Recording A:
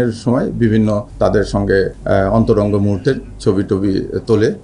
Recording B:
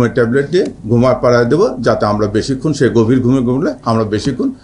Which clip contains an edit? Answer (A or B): A